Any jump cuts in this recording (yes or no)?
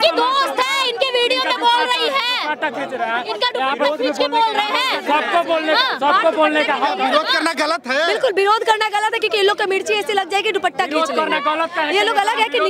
no